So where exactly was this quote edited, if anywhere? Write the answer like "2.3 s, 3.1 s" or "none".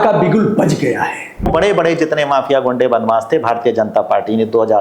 1.5 s